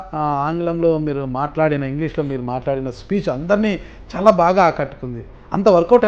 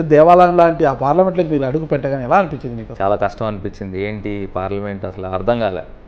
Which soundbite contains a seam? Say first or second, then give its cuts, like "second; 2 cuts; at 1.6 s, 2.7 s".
second; 1 cut; at 2.8 s